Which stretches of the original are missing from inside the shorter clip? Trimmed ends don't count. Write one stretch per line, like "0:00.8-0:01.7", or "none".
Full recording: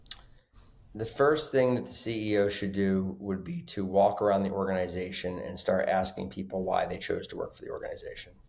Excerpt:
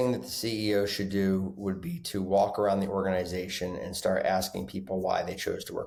none